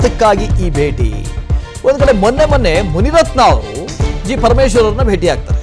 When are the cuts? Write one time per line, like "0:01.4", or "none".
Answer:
none